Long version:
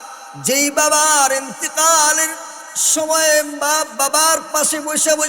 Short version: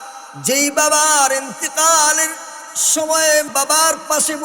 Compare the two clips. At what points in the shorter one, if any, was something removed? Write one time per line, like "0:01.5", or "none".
0:03.5